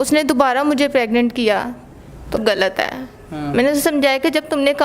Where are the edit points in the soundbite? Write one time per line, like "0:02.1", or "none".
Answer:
0:02.4